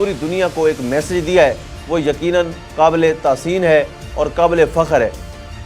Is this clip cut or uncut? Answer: uncut